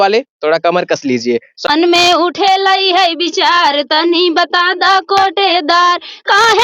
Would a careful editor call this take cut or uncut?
cut